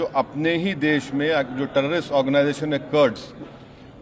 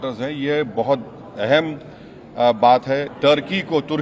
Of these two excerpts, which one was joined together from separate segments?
second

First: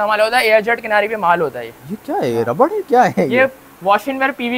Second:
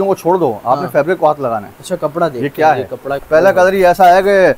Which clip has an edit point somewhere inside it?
second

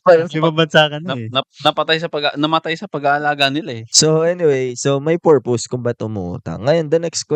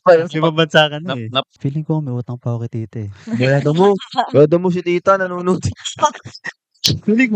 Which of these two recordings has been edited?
second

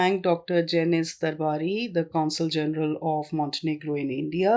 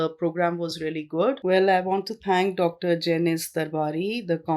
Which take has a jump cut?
second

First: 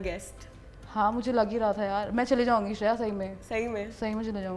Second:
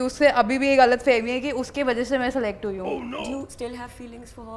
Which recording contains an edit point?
second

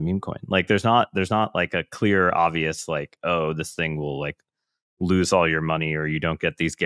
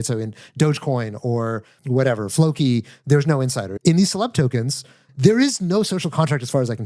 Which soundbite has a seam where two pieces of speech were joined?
second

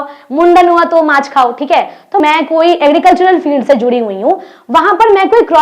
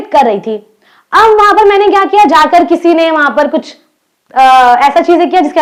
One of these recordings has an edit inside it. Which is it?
first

